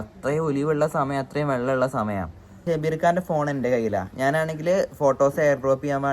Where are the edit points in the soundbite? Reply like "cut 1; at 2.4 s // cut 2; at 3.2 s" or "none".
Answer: cut 1; at 2.6 s